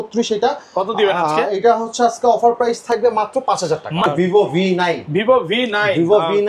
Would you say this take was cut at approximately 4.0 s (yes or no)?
yes